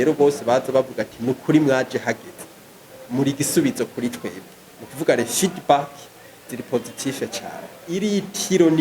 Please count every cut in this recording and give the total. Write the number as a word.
one